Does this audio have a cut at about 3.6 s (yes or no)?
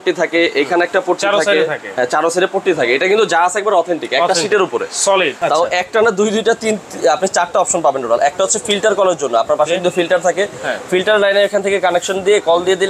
no